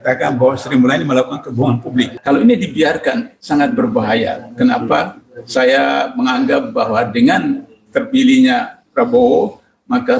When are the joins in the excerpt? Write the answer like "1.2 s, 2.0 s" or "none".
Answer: 2.1 s, 3.3 s